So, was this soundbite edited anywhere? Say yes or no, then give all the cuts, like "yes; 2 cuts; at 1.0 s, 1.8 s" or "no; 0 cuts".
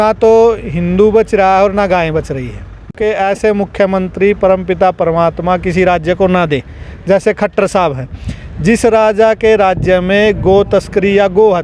yes; 1 cut; at 2.8 s